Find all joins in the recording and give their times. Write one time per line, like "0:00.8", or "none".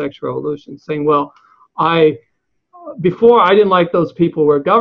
none